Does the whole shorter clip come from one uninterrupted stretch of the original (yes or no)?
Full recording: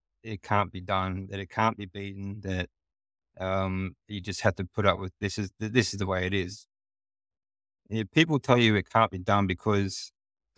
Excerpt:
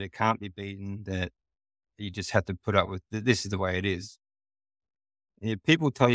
no